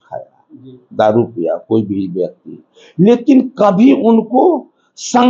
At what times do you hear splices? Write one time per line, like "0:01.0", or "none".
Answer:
none